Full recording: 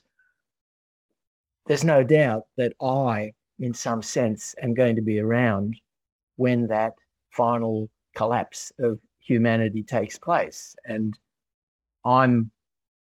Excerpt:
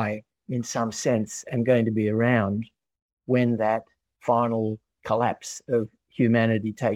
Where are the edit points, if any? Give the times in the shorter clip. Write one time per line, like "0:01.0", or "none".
none